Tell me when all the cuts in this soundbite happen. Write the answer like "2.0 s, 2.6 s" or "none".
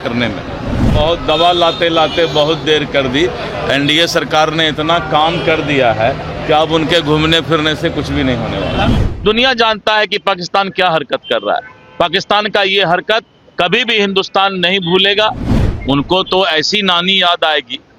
0.8 s, 8.9 s, 15.5 s